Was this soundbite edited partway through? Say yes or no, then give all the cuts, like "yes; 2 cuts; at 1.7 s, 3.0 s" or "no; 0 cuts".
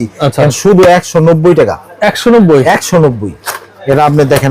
no; 0 cuts